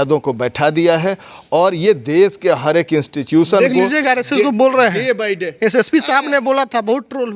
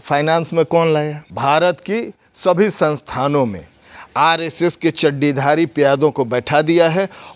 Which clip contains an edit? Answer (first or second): second